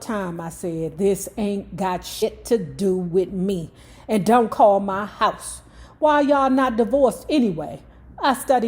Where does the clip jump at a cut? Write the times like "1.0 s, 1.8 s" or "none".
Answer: 2.2 s